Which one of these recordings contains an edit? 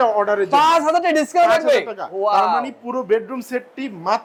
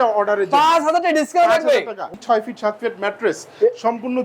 second; 1 cut; at 2.1 s

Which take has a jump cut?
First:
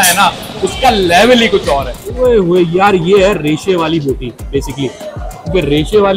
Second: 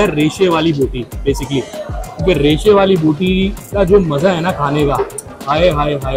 first; 1 cut; at 2.0 s

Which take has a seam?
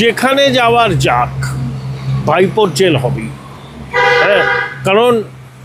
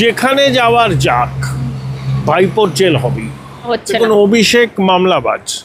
second; 1 cut; at 3.7 s

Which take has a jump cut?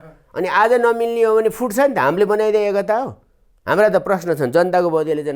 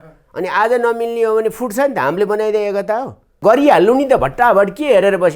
second; 1 cut; at 3.4 s

